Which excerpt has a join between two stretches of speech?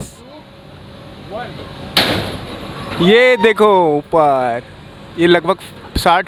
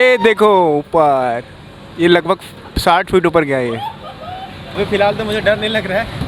second; 1 cut; at 4.7 s

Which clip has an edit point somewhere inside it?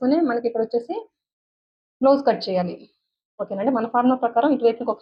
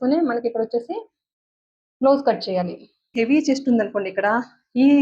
second; 1 cut; at 3.1 s

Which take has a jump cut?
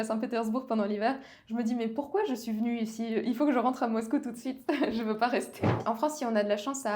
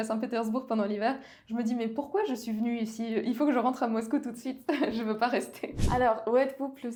first; 1 cut; at 5.8 s

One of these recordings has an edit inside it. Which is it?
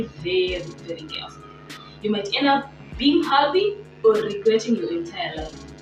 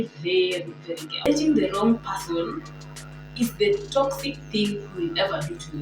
second; 1 cut; at 1.3 s

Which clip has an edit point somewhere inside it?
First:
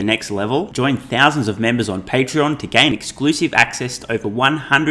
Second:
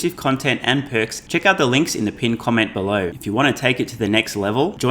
second; 2 cuts; at 1.2 s, 3.2 s

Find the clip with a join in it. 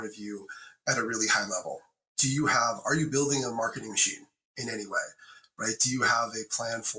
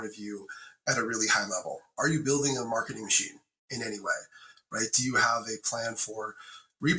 second; 1 cut; at 1.9 s

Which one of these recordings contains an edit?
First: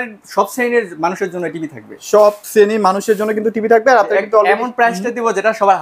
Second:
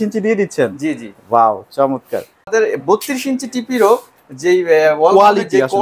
second; 1 cut; at 2.5 s

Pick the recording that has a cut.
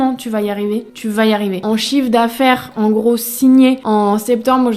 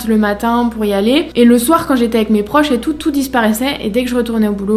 first; 3 cuts; at 0.9 s, 1.6 s, 3.8 s

